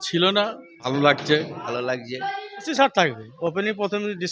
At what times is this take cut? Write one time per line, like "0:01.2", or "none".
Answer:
0:00.9
0:01.6
0:02.7